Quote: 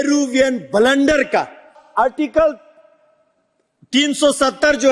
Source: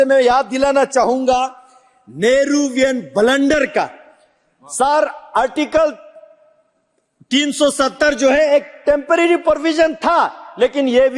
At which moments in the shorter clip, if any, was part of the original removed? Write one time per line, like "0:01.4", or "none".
0:01.8